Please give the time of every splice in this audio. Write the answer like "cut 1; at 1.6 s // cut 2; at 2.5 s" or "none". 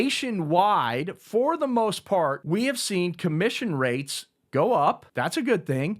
cut 1; at 2.4 s // cut 2; at 5.1 s